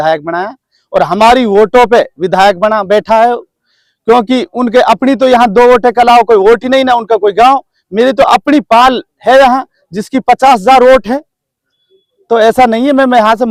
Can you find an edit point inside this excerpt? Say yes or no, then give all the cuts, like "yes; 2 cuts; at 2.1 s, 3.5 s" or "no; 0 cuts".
no; 0 cuts